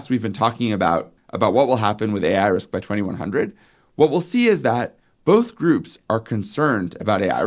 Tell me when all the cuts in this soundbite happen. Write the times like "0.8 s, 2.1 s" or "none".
1.2 s